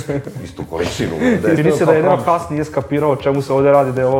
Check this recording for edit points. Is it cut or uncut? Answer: cut